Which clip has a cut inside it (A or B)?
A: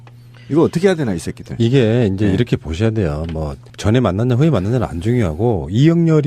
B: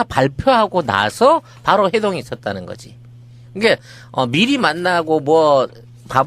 A